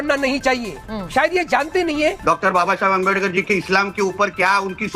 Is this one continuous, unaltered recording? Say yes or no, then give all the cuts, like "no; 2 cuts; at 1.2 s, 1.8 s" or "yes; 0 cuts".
no; 1 cut; at 2.2 s